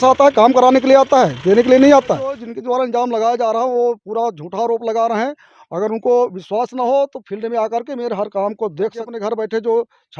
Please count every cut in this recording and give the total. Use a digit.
2